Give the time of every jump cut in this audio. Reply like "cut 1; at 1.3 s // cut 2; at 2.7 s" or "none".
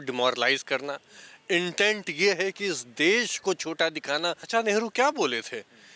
cut 1; at 4.5 s